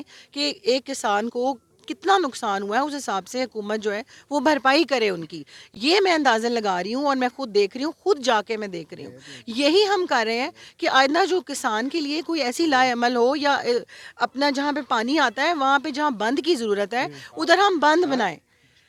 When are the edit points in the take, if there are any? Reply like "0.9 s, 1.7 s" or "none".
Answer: none

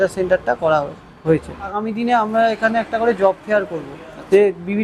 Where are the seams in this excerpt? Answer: 1.8 s

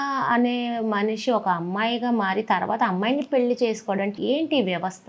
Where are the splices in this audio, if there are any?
4.2 s

